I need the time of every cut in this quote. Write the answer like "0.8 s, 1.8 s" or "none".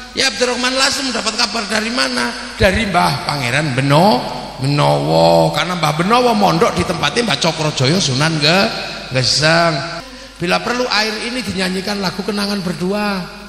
10.0 s